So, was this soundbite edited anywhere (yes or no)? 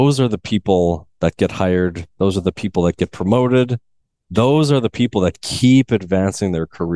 no